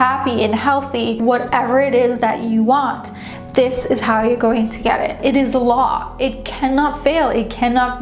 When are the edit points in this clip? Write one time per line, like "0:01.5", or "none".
0:01.2
0:05.2